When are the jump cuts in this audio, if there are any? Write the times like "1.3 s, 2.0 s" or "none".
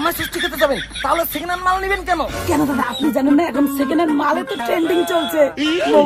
none